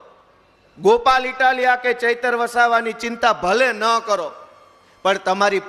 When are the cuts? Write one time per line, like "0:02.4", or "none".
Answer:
none